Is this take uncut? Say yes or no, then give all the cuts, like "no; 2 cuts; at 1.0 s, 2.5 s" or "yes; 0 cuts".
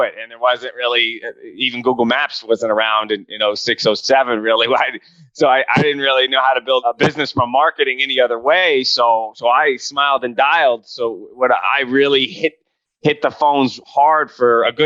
yes; 0 cuts